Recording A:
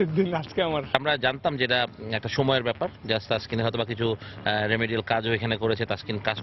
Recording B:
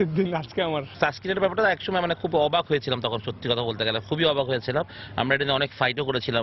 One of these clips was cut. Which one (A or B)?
A